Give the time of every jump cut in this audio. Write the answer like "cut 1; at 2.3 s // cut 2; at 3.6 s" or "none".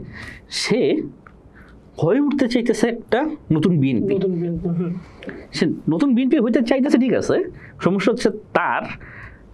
none